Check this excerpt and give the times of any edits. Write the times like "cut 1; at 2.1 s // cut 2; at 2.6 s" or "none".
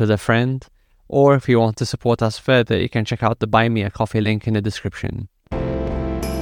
cut 1; at 5.5 s